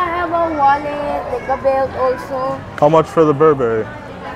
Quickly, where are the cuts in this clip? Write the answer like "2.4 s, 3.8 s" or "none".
2.7 s